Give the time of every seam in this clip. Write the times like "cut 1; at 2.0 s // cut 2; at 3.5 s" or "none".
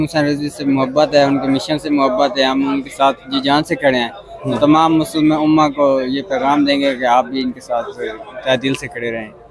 none